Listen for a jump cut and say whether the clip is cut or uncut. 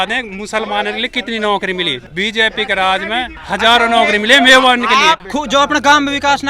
cut